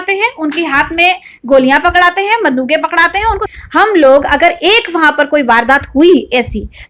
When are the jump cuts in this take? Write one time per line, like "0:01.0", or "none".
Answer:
0:03.4